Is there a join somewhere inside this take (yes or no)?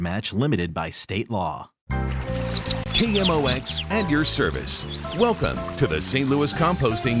yes